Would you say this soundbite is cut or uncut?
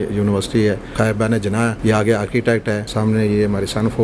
cut